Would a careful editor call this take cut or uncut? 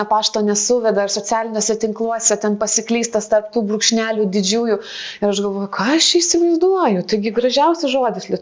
uncut